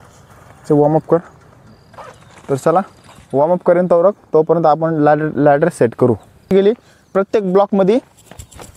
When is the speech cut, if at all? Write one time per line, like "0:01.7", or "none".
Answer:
0:06.5